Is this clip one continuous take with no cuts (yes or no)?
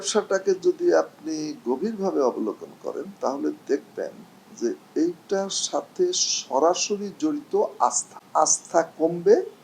no